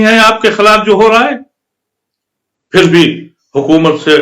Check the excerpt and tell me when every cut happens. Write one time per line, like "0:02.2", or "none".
none